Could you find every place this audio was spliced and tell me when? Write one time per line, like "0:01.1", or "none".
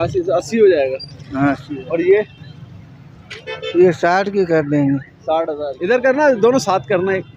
0:05.7